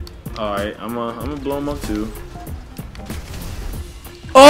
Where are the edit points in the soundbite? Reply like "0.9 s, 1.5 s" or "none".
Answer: none